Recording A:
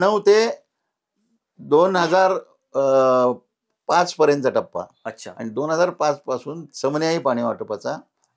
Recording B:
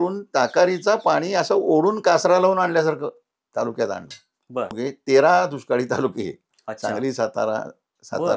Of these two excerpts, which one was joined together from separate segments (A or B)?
B